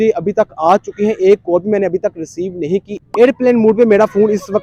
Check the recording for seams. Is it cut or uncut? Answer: uncut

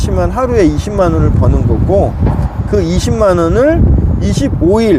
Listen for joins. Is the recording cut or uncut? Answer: uncut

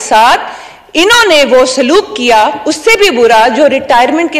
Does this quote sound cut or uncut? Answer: uncut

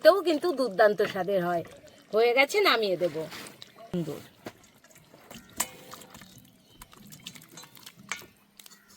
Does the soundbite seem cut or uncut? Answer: cut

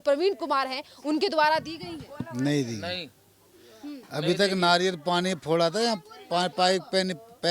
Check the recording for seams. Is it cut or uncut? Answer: uncut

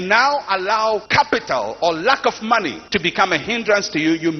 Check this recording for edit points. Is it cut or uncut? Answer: cut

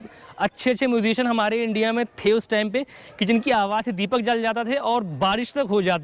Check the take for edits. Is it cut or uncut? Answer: uncut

